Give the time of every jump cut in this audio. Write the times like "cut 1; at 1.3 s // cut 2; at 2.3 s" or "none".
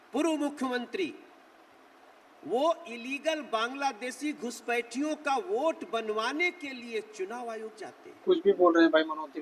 cut 1; at 8.0 s